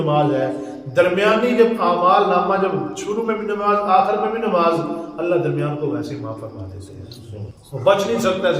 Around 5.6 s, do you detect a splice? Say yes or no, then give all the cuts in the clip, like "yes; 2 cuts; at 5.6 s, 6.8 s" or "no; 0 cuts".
no; 1 cut; at 7.5 s